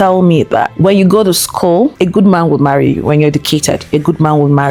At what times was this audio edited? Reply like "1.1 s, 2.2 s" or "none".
none